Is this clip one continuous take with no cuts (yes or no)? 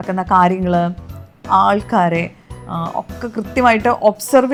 yes